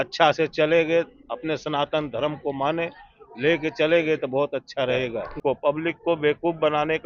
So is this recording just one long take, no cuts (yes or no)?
no